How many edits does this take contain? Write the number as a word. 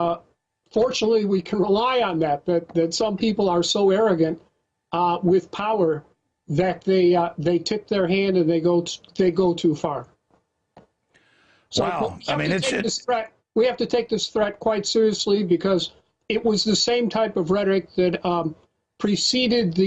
one